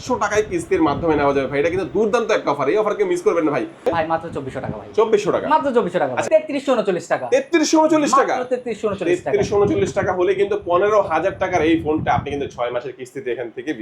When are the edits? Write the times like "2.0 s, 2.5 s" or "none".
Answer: 3.8 s, 6.3 s